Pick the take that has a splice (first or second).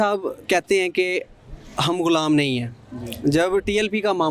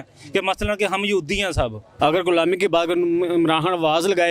second